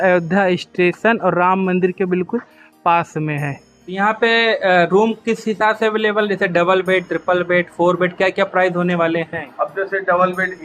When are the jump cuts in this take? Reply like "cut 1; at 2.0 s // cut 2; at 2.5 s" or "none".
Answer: cut 1; at 4.0 s